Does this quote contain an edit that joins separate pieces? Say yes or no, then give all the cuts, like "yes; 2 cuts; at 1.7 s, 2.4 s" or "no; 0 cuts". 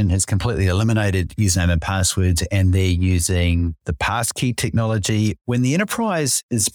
no; 0 cuts